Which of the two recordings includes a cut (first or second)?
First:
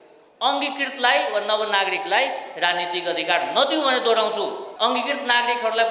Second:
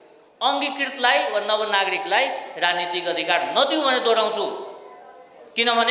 first